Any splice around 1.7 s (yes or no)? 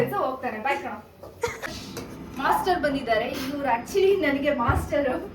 yes